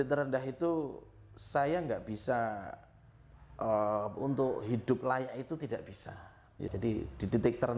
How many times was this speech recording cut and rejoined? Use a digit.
1